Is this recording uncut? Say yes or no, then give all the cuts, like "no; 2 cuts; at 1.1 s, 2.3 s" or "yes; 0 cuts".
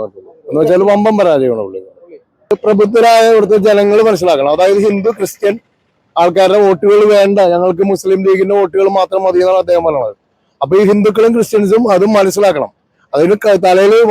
no; 1 cut; at 2.5 s